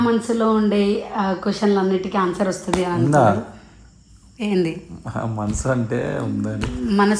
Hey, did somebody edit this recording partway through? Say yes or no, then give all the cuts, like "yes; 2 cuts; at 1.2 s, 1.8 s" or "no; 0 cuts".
no; 0 cuts